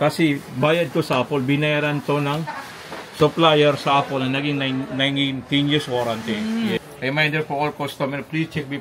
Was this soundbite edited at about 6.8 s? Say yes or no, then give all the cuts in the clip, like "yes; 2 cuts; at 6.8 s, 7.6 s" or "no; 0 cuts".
yes; 1 cut; at 6.8 s